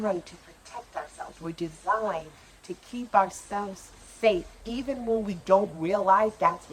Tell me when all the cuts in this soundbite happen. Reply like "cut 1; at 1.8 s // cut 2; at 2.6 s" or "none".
none

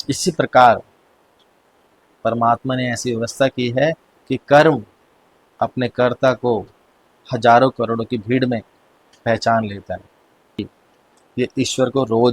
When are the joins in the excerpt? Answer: cut 1; at 10.6 s

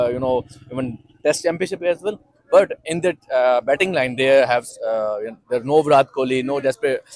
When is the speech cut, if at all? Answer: none

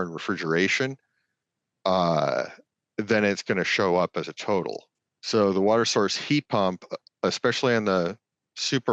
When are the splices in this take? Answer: none

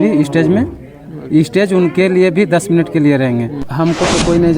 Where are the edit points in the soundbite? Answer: cut 1; at 3.7 s

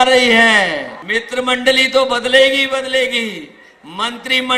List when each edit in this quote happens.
cut 1; at 0.9 s

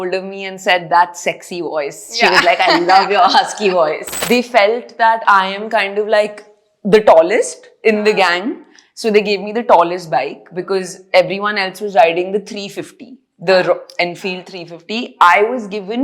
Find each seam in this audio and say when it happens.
cut 1; at 4.1 s

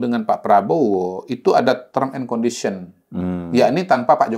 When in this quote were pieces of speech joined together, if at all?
none

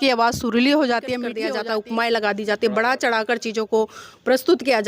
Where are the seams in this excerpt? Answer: cut 1; at 1.4 s

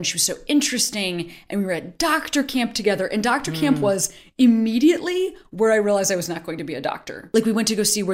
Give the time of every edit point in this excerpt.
cut 1; at 7.1 s

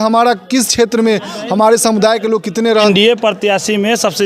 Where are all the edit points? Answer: cut 1; at 2.9 s

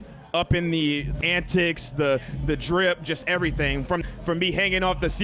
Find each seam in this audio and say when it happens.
cut 1; at 1.2 s // cut 2; at 4.0 s

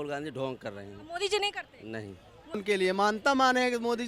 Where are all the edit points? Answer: cut 1; at 2.6 s

